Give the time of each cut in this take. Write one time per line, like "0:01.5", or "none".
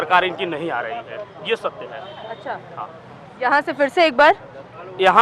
none